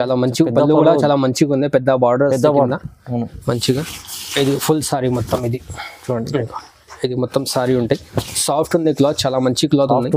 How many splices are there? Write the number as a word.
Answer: zero